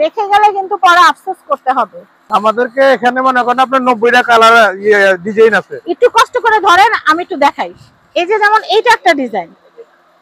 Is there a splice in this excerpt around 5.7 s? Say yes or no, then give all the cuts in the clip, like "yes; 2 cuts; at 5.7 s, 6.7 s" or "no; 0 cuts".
no; 1 cut; at 2.1 s